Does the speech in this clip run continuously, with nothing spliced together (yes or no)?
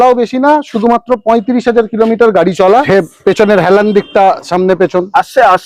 no